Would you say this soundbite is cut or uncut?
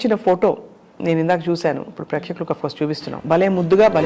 cut